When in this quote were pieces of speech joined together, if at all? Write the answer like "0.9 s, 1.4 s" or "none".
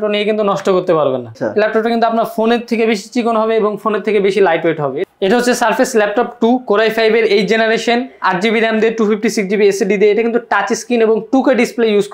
1.3 s, 5.0 s

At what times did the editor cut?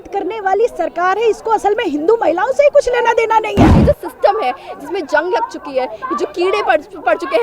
3.8 s

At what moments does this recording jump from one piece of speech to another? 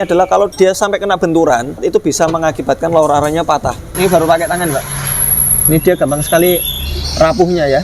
1.8 s, 3.9 s

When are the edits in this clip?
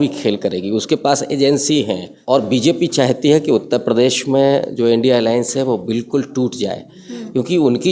2.1 s

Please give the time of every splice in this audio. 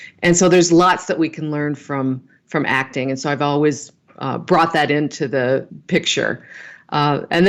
5.7 s

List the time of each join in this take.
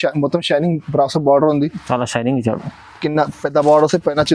none

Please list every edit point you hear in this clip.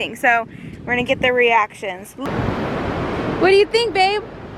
2.2 s

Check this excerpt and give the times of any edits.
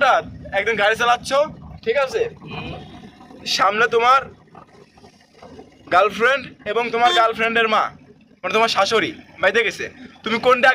none

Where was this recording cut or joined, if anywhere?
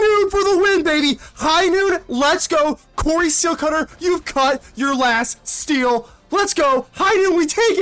none

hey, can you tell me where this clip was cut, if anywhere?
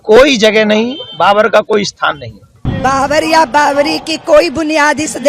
2.6 s

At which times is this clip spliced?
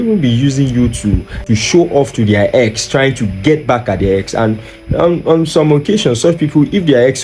1.4 s

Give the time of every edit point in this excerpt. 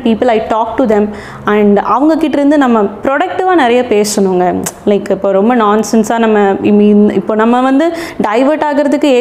none

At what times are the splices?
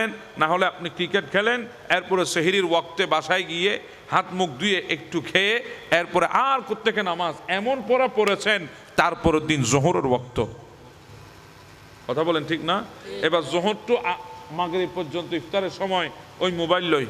none

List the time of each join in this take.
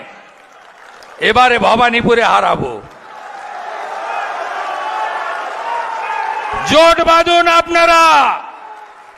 none

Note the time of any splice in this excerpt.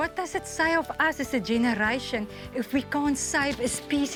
none

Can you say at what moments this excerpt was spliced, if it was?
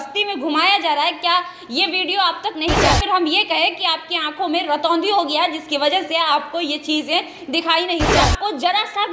2.8 s, 8.2 s

